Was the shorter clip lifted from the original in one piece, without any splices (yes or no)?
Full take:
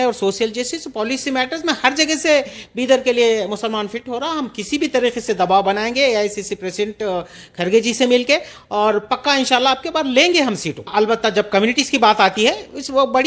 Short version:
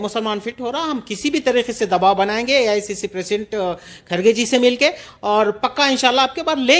yes